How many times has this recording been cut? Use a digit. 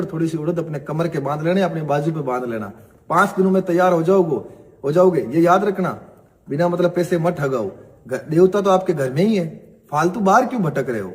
1